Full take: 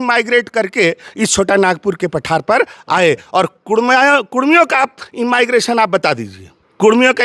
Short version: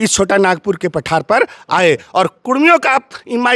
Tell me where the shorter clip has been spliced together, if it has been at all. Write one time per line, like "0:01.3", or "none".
0:02.4